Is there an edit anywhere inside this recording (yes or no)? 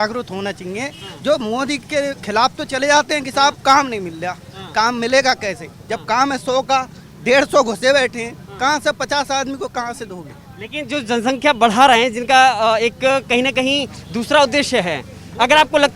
no